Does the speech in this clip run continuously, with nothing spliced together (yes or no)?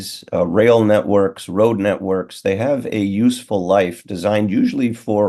yes